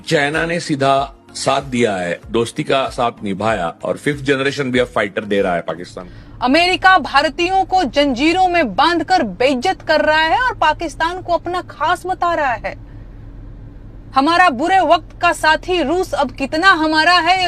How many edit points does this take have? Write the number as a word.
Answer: one